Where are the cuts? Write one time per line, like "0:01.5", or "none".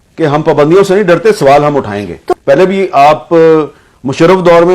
0:02.2